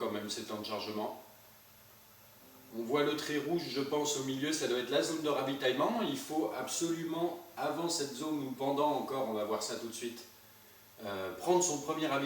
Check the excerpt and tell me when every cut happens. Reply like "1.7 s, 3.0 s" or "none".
9.6 s